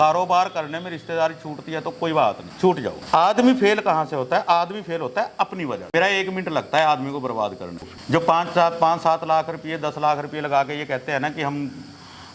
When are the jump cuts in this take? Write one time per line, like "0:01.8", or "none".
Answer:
0:03.0
0:05.9
0:07.8